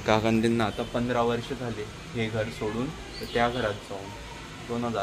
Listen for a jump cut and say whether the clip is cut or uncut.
uncut